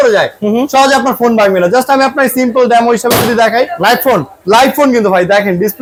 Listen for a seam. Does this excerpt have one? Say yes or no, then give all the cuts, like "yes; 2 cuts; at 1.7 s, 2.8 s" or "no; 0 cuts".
no; 0 cuts